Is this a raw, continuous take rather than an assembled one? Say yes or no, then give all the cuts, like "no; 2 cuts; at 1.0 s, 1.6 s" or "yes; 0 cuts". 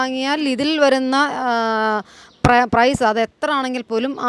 yes; 0 cuts